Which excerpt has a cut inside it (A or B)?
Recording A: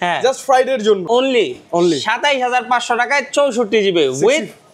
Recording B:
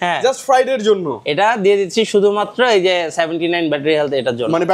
A